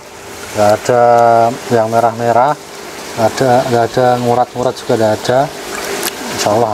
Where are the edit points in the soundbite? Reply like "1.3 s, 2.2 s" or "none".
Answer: none